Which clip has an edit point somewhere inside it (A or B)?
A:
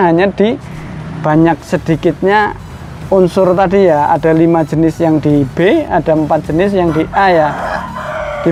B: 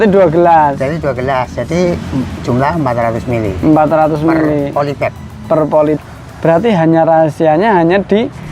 B